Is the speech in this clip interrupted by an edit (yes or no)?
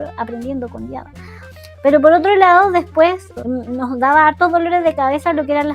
yes